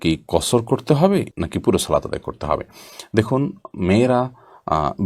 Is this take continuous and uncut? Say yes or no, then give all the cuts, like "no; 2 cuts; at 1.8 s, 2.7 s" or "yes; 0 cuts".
yes; 0 cuts